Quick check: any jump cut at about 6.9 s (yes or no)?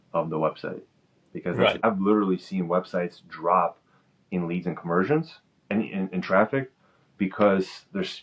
no